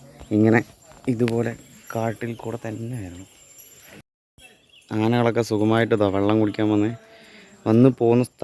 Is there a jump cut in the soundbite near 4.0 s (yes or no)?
yes